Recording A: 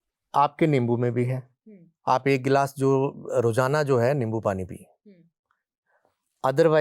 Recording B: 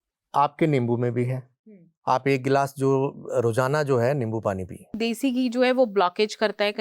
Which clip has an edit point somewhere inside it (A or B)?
B